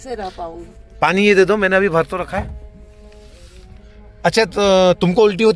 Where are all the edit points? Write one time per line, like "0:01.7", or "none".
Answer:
none